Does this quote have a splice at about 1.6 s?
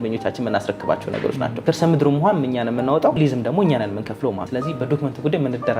yes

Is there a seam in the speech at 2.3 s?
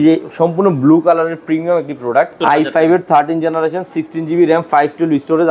yes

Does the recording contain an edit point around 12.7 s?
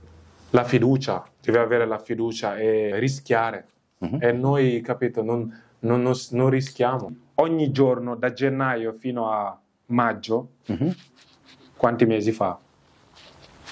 no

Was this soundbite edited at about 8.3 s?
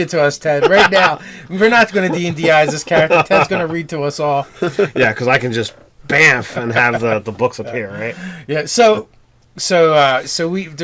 no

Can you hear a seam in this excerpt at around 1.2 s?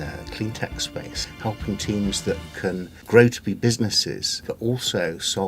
yes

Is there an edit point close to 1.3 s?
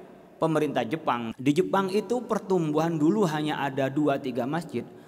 yes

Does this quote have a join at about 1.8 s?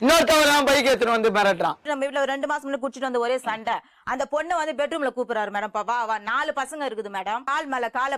yes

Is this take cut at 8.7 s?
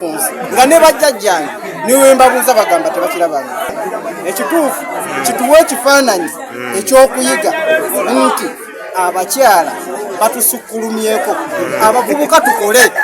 no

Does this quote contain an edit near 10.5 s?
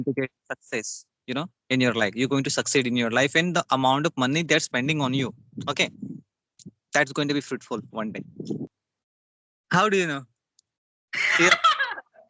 no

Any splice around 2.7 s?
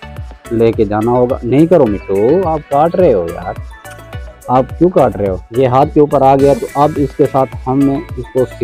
no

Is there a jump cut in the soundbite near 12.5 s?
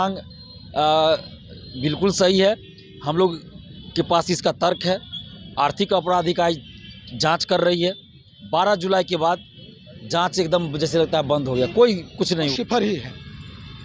yes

